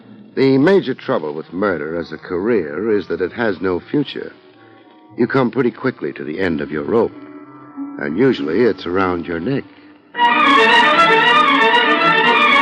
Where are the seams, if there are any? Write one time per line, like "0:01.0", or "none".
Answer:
none